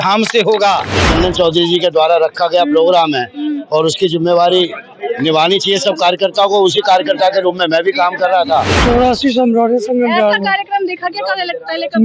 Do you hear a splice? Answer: yes; 2 cuts; at 1.0 s, 8.7 s

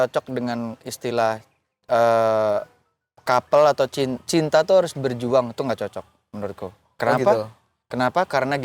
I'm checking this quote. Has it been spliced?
no; 0 cuts

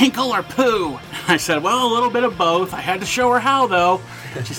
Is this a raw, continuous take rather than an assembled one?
no; 1 cut; at 1.1 s

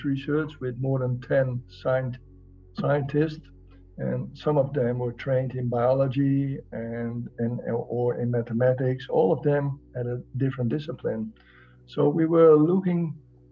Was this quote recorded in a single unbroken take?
yes; 0 cuts

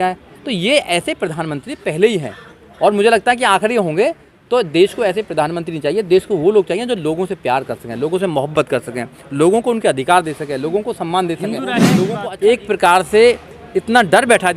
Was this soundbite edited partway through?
yes; 1 cut; at 11.9 s

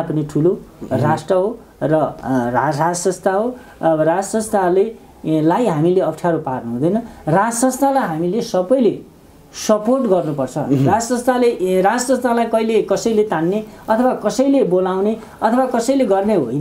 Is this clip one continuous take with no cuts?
yes; 0 cuts

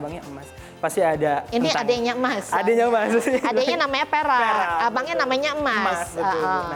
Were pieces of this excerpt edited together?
no; 0 cuts

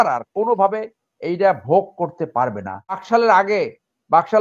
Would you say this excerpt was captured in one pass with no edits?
no; 1 cut; at 3.0 s

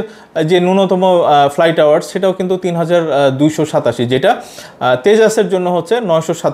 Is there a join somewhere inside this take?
no; 0 cuts

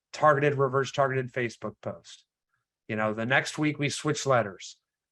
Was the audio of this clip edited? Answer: no; 0 cuts

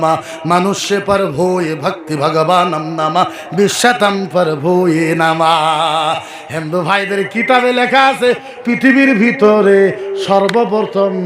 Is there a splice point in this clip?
no; 0 cuts

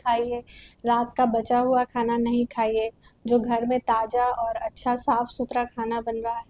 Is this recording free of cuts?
yes; 0 cuts

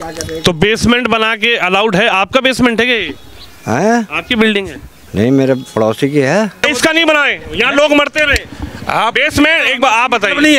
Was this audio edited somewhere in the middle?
yes; 1 cut; at 6.7 s

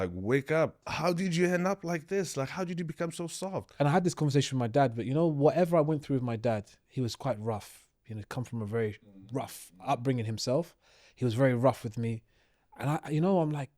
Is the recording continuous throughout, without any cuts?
no; 2 cuts; at 0.9 s, 3.7 s

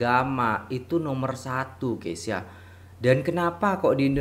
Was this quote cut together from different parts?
no; 0 cuts

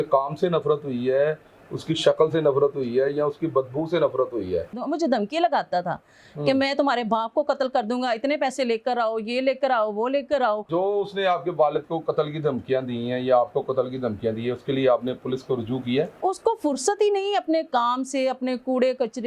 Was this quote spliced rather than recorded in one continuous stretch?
yes; 3 cuts; at 4.8 s, 10.6 s, 16.2 s

